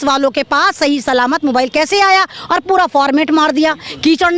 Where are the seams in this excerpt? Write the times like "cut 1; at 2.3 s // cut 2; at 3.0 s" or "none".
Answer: none

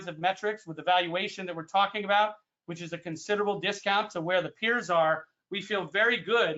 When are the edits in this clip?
none

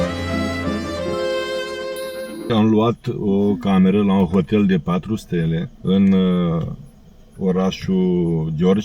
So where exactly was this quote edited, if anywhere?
none

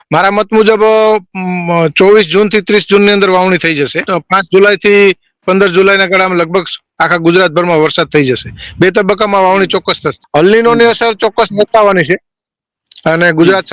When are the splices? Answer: cut 1; at 4.0 s // cut 2; at 10.1 s

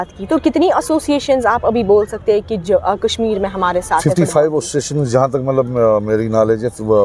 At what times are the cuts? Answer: none

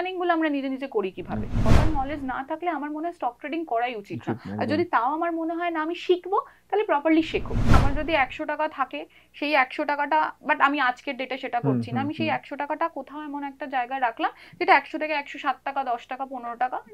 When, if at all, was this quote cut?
cut 1; at 1.7 s // cut 2; at 7.8 s

